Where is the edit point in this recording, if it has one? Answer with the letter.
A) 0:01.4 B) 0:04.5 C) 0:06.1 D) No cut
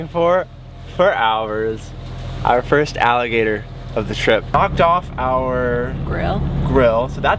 B